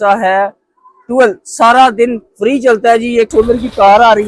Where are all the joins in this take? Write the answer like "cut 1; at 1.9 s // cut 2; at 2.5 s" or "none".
cut 1; at 3.3 s